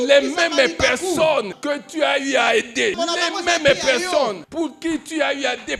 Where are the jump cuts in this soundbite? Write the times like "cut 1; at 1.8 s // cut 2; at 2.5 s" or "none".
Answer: cut 1; at 1.5 s // cut 2; at 3.0 s // cut 3; at 4.4 s